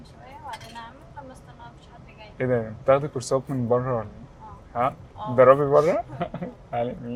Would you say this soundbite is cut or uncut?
uncut